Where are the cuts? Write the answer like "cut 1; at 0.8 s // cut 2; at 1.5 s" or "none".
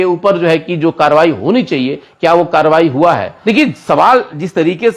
cut 1; at 3.3 s